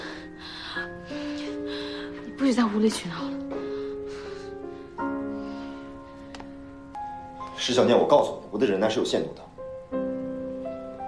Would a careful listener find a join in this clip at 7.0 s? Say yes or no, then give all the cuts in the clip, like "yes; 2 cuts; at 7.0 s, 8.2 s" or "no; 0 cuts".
yes; 1 cut; at 7.0 s